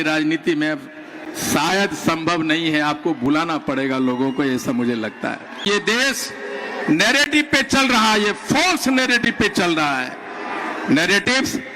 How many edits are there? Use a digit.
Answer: 1